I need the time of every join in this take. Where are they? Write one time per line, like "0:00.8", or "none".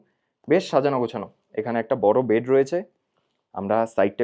none